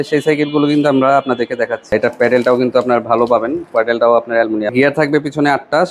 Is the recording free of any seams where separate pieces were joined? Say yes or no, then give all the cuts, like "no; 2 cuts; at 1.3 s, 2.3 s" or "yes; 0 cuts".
no; 2 cuts; at 1.9 s, 4.7 s